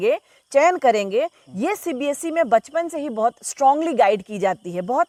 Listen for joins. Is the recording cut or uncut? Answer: uncut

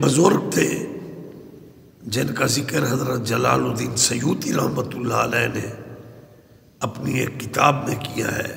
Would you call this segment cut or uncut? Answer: uncut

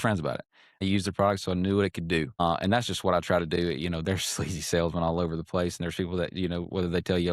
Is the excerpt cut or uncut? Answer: cut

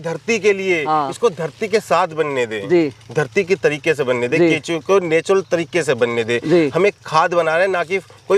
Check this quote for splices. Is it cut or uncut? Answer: uncut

